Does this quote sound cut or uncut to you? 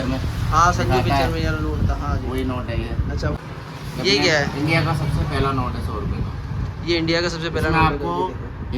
cut